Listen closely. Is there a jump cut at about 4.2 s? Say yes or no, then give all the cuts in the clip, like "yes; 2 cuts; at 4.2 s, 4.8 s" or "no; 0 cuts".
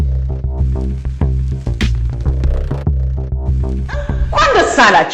yes; 1 cut; at 4.2 s